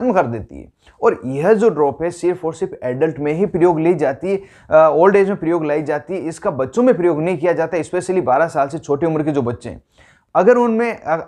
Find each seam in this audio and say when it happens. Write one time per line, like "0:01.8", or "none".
none